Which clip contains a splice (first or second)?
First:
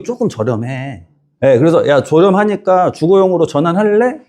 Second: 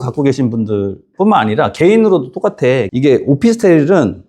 second